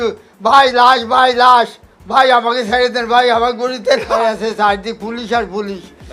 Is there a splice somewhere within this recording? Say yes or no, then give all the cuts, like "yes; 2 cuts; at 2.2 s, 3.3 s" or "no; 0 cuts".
yes; 1 cut; at 4.2 s